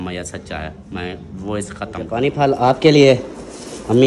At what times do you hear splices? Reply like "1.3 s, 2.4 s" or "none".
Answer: 2.2 s